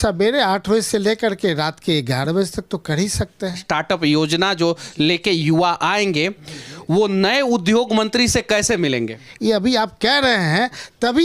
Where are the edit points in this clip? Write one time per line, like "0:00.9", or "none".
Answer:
0:03.6
0:09.2